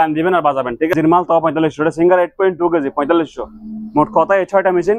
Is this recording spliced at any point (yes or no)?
yes